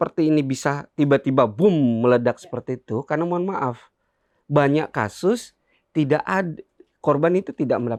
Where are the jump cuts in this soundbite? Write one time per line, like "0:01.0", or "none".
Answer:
none